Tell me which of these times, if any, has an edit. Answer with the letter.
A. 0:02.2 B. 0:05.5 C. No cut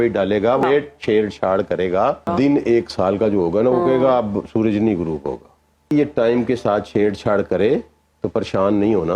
A